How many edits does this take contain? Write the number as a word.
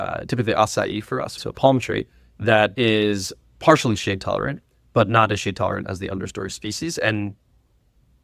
one